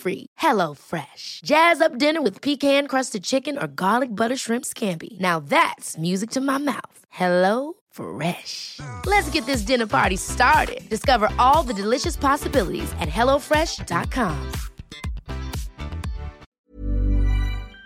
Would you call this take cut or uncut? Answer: cut